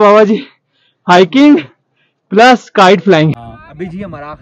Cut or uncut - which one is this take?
cut